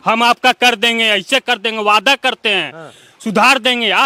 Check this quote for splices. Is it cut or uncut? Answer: uncut